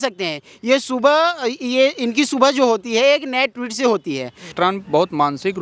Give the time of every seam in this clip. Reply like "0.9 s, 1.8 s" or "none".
4.5 s